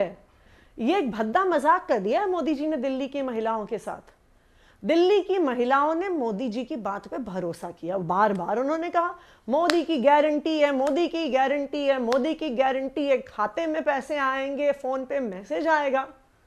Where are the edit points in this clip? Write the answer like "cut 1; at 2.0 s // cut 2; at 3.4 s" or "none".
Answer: none